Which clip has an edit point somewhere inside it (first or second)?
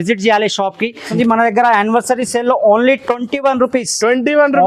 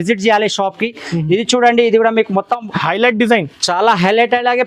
first